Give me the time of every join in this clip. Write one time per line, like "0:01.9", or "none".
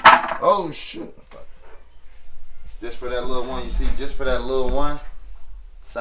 0:01.2